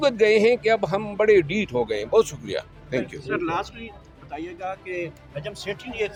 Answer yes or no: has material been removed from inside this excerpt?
no